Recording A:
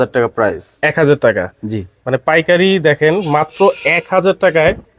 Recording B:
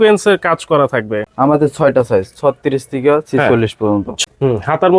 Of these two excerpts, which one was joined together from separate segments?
B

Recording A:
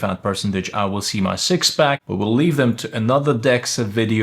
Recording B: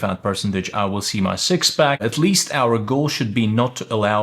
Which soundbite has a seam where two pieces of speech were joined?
B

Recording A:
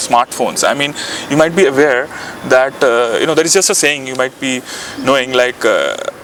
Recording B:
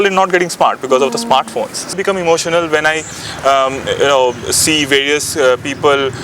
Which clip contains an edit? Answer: B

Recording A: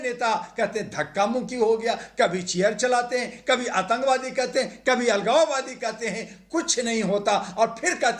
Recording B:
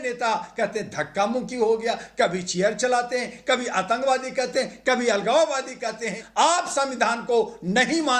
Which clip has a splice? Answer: B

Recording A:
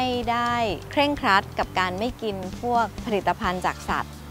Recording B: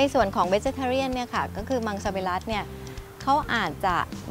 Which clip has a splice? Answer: A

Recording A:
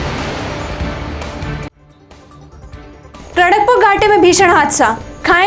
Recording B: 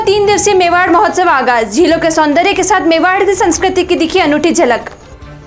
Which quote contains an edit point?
A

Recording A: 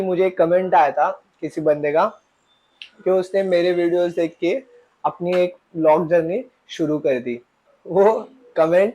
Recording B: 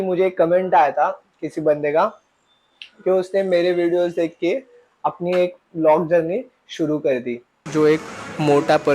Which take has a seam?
B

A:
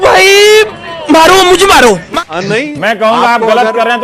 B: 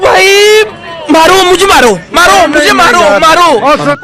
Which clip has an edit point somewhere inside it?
A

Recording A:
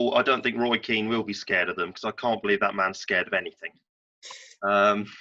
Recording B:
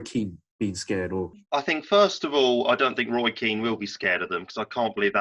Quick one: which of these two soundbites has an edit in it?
B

